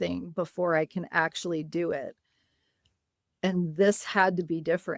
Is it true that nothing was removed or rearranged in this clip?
yes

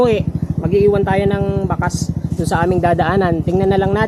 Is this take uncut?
yes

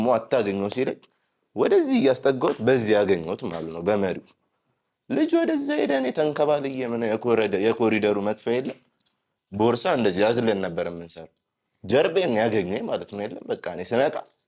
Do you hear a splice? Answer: no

